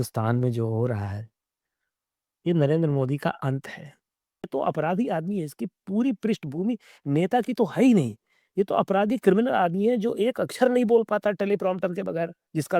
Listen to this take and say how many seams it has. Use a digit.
1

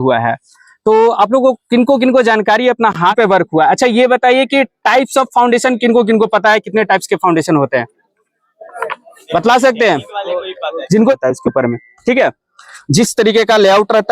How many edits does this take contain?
2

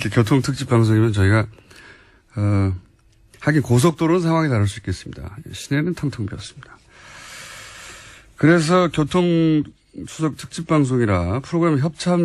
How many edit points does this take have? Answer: 1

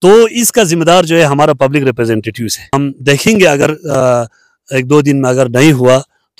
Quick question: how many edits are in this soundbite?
1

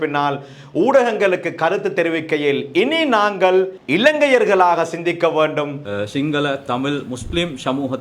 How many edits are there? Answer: 1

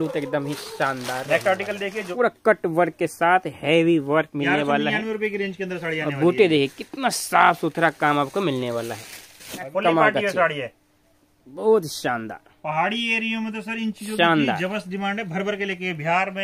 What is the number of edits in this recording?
2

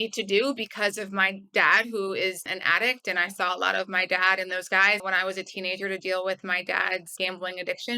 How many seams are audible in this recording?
3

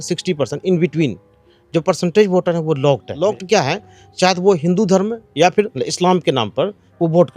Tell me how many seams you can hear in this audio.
2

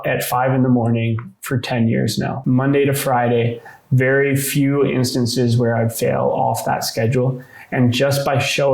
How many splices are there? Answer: 1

